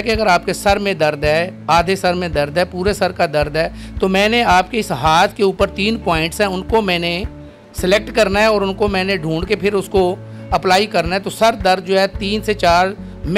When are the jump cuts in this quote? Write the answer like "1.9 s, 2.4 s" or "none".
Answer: none